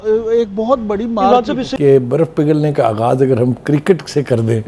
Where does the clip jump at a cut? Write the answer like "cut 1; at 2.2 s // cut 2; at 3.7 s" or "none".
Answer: cut 1; at 1.7 s